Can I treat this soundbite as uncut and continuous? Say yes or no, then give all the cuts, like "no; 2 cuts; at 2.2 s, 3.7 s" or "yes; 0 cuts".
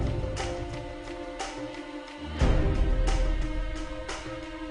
yes; 0 cuts